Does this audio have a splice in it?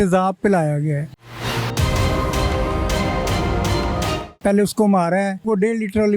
yes; 3 cuts; at 1.2 s, 4.2 s, 5.4 s

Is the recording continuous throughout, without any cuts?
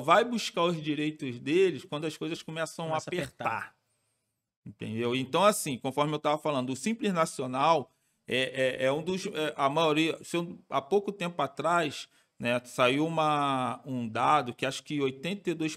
yes; 0 cuts

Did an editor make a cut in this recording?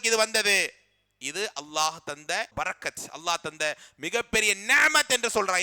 yes; 1 cut; at 2.5 s

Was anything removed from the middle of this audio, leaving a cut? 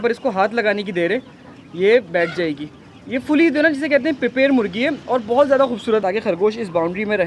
yes; 1 cut; at 6.0 s

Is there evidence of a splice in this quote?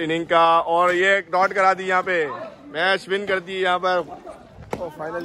no; 0 cuts

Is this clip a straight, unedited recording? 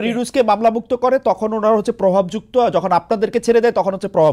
yes; 0 cuts

